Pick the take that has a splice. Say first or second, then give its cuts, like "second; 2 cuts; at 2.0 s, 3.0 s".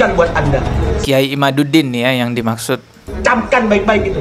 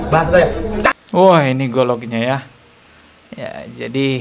first; 1 cut; at 3.1 s